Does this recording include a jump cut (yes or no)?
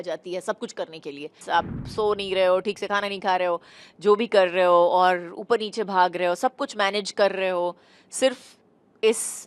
yes